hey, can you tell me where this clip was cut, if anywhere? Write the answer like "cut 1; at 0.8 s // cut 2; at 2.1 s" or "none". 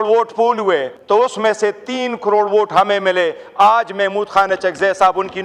cut 1; at 0.9 s